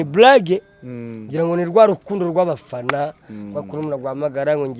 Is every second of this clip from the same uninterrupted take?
yes; 0 cuts

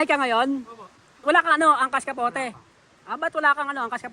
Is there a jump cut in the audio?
yes; 1 cut; at 1.1 s

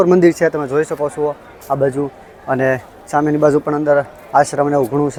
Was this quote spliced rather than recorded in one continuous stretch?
no; 0 cuts

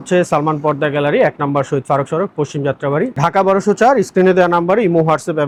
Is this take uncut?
yes; 0 cuts

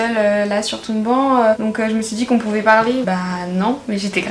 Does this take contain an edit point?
no; 0 cuts

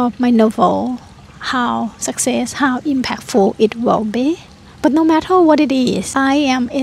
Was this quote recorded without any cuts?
yes; 0 cuts

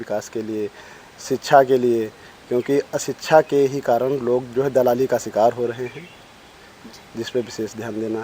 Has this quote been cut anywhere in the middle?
no; 0 cuts

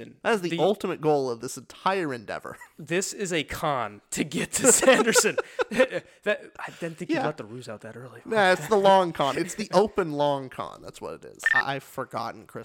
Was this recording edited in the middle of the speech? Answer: yes; 1 cut; at 11.4 s

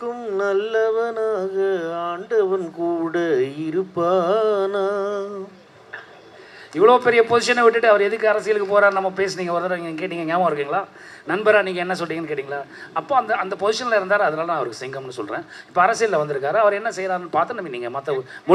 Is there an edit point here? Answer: no; 0 cuts

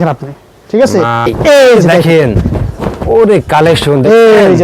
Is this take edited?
yes; 1 cut; at 1.3 s

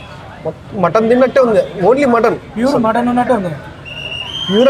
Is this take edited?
no; 0 cuts

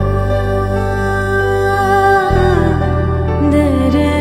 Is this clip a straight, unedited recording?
no; 1 cut; at 2.4 s

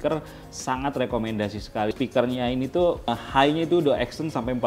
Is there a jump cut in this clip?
yes; 2 cuts; at 1.9 s, 3.2 s

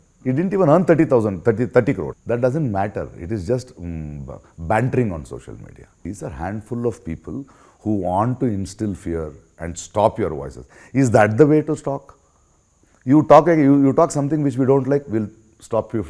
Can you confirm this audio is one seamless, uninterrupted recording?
no; 2 cuts; at 2.2 s, 6.0 s

